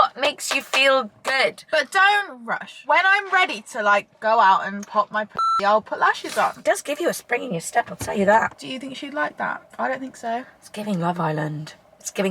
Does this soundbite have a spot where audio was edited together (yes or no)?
yes